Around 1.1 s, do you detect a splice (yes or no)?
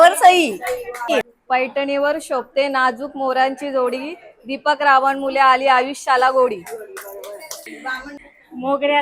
yes